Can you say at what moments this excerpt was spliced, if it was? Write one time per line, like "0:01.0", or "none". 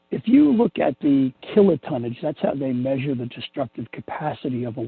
0:01.4